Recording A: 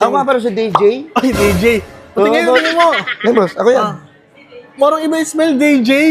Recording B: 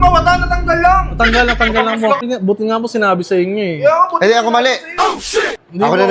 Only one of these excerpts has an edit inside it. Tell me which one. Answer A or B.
B